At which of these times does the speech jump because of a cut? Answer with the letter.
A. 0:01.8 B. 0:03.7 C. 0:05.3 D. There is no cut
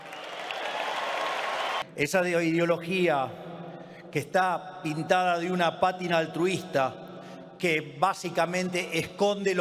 A